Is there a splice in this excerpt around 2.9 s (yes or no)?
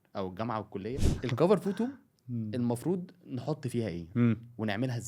no